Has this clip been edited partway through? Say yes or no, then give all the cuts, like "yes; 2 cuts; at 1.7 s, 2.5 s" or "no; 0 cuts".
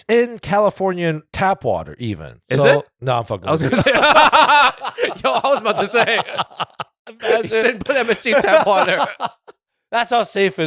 no; 0 cuts